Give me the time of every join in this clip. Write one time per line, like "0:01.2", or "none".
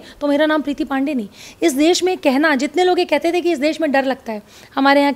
none